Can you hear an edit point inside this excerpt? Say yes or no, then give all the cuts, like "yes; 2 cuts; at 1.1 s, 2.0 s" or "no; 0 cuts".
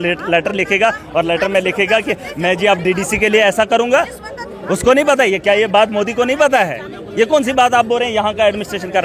no; 0 cuts